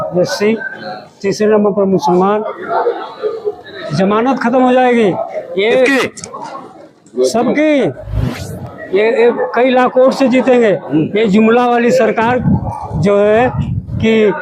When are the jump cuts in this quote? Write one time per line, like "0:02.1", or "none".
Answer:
none